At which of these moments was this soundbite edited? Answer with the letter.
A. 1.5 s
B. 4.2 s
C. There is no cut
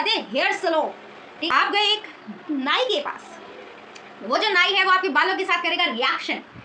A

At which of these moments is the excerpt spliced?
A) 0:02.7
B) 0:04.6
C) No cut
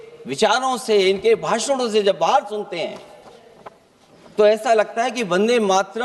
C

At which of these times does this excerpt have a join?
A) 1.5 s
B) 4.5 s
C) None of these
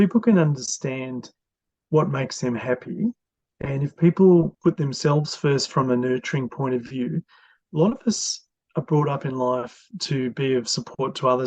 B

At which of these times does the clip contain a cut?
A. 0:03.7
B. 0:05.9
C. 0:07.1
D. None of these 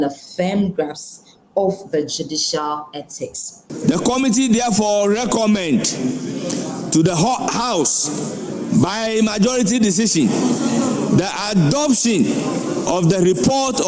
A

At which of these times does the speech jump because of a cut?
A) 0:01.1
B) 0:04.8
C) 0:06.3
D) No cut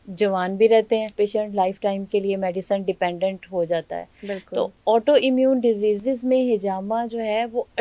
A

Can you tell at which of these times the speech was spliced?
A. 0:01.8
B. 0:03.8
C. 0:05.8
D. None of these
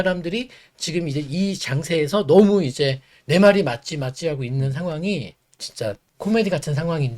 C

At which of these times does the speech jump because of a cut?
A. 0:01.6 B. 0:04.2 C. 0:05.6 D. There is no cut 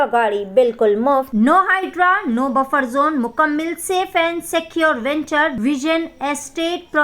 C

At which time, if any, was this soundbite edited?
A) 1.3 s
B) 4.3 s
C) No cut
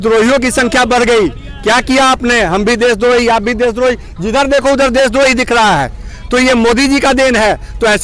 C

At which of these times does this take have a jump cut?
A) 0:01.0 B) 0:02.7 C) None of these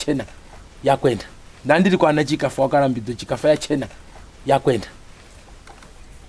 C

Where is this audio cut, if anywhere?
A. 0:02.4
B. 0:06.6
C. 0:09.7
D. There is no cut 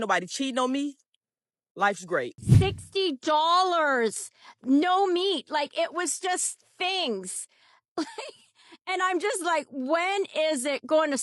A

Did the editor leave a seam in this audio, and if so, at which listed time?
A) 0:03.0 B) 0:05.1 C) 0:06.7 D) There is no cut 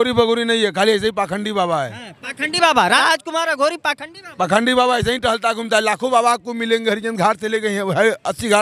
A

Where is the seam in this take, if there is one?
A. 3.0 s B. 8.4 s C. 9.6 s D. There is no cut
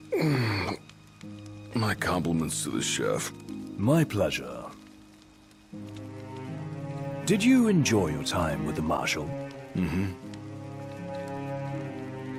D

